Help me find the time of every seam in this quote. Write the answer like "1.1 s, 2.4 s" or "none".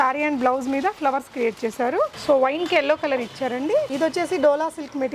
2.2 s, 3.9 s